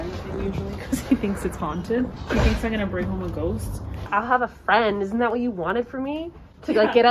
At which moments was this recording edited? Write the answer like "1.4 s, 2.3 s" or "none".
2.1 s, 4.0 s

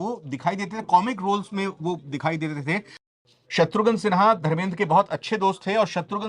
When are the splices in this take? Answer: 3.1 s

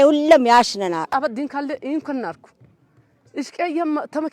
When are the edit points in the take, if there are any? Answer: 1.1 s

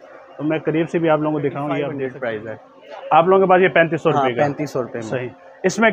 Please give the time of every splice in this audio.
2.0 s

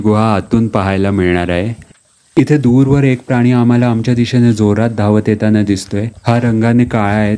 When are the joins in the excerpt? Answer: 1.8 s

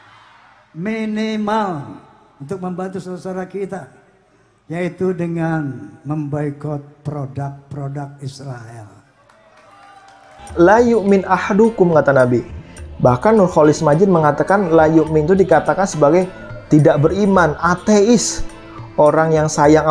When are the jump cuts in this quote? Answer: 10.5 s

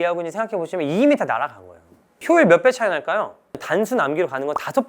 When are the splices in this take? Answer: 2.1 s, 3.5 s

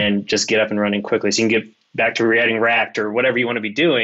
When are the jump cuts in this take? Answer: none

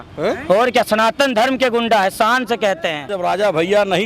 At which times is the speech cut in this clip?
3.1 s

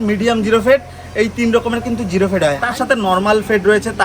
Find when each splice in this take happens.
2.6 s

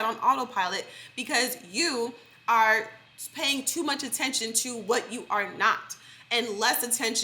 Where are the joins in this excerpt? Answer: none

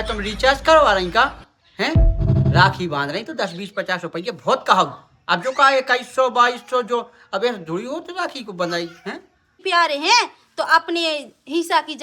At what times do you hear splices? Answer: 9.5 s

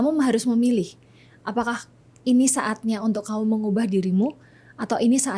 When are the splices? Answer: none

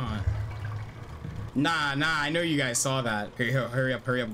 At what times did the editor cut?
1.5 s, 3.3 s

